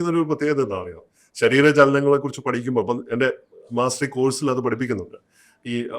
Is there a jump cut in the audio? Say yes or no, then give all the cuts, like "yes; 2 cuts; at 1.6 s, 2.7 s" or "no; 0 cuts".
no; 0 cuts